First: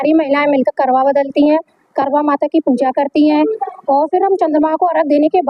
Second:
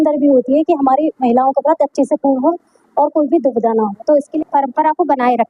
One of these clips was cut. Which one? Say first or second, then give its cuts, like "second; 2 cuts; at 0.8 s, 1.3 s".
second; 1 cut; at 4.3 s